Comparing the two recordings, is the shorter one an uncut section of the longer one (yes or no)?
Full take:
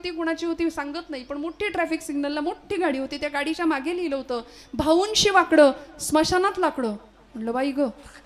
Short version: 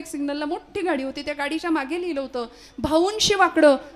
yes